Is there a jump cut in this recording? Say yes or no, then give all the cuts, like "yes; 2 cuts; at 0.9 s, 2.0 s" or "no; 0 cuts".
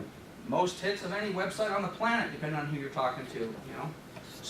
yes; 1 cut; at 1.7 s